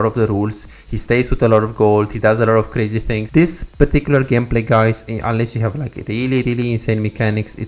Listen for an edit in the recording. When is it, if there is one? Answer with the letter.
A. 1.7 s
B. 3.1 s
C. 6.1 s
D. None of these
B